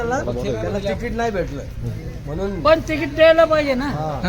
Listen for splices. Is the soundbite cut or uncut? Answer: uncut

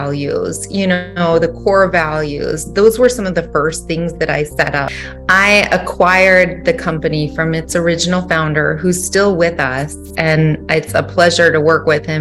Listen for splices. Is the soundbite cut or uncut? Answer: cut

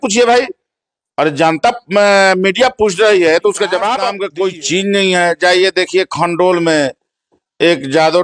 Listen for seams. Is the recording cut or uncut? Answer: cut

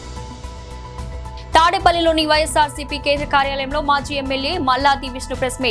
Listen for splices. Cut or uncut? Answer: uncut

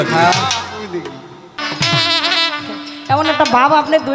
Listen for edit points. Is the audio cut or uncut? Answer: cut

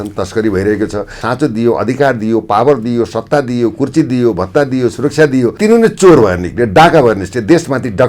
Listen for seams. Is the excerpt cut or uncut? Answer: cut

